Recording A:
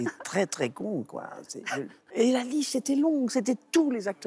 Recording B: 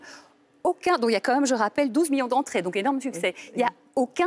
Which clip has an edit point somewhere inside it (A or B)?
A